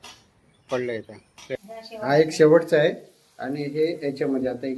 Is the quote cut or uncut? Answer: cut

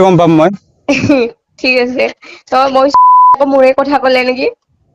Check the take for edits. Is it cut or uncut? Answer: cut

